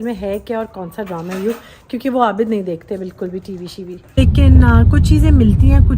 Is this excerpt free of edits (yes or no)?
no